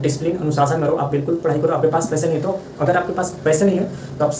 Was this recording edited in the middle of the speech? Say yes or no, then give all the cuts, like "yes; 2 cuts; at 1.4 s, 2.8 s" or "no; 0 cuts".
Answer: no; 0 cuts